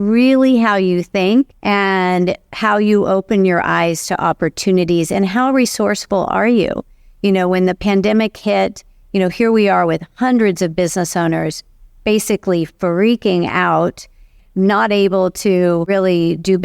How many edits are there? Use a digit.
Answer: 3